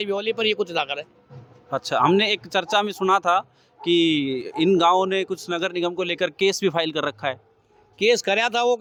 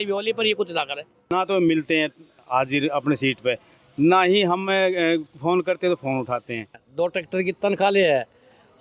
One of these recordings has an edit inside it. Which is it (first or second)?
second